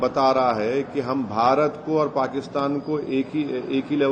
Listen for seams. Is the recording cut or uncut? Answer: uncut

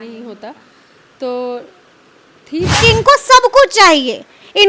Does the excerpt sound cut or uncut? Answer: cut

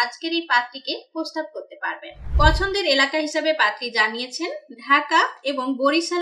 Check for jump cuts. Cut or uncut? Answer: cut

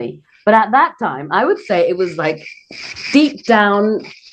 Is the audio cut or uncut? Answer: uncut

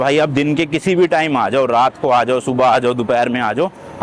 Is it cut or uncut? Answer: uncut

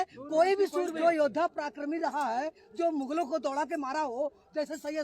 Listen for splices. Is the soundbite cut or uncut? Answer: cut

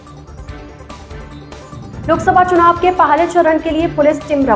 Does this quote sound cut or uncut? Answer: uncut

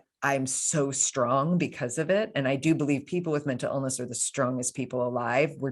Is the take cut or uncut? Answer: uncut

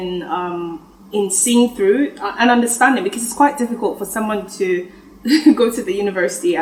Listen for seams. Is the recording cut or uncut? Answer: uncut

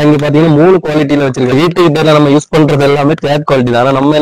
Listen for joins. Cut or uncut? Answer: cut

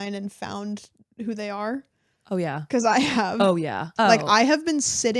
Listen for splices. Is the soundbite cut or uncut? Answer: cut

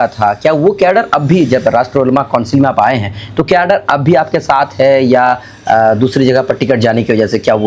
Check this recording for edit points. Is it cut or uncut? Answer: uncut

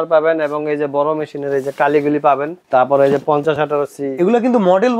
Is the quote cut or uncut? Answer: cut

